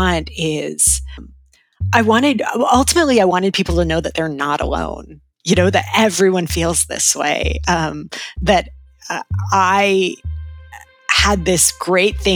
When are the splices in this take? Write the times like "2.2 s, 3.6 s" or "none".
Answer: 1.3 s

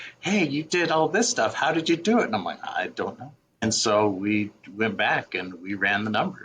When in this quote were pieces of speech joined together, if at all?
3.6 s

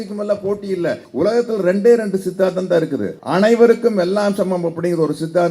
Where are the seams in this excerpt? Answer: 1.0 s, 3.2 s

